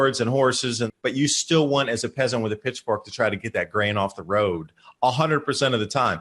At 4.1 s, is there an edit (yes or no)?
no